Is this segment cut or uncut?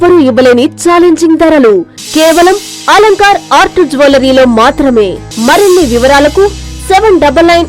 cut